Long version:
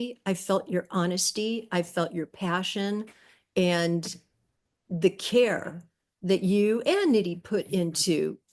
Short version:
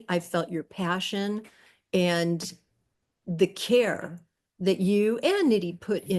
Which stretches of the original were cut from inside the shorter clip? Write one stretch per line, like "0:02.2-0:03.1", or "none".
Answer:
none

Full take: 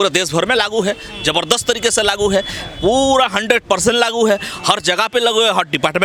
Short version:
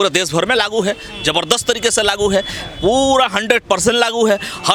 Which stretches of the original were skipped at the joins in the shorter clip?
none

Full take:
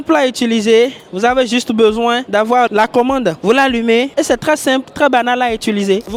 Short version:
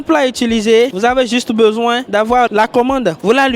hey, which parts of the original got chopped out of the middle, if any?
0:00.9-0:01.1

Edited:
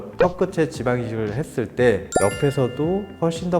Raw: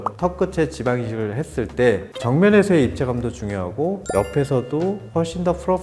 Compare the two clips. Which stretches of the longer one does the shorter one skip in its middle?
0:02.1-0:04.0

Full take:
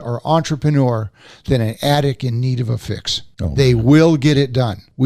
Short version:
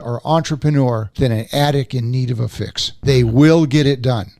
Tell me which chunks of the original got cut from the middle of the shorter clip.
0:01.1-0:01.4
0:03.2-0:03.4

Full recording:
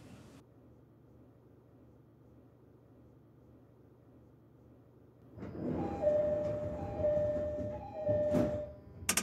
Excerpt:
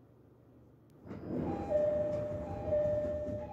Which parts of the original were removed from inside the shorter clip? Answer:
0:02.3-0:05.3

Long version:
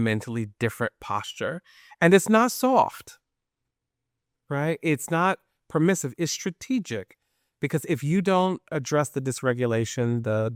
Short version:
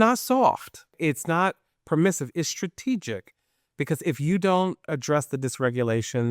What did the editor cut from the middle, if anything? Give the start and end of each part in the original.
0:03.3-0:04.8

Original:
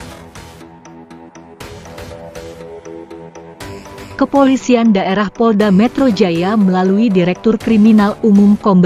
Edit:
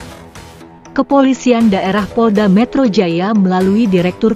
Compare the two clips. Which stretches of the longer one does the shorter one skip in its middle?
0:00.9-0:04.2

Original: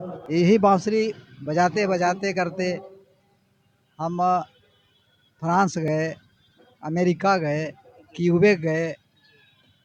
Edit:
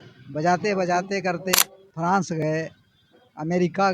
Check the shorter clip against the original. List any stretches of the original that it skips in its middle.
0:02.7-0:05.0

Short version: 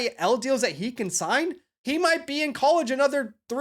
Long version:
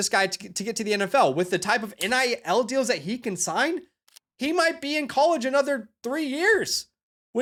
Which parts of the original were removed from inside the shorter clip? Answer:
0:04.0-0:04.2

